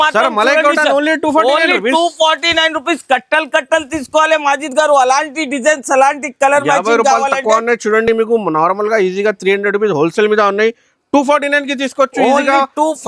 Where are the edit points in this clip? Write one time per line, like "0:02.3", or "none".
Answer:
none